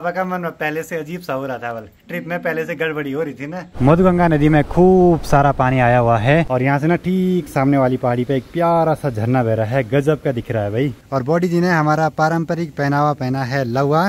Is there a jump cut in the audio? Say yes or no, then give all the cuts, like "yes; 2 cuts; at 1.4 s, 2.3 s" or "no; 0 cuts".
yes; 3 cuts; at 3.6 s, 6.5 s, 11.0 s